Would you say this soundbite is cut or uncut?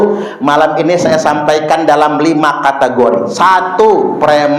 uncut